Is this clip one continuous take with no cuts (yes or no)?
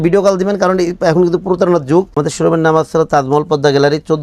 no